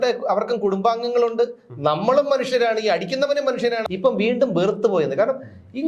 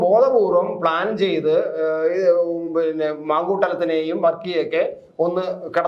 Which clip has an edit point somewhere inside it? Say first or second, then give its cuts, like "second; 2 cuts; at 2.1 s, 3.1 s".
first; 1 cut; at 3.8 s